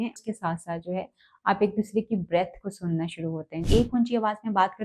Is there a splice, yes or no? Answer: yes